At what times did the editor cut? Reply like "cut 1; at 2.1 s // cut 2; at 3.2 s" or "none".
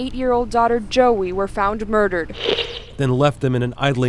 none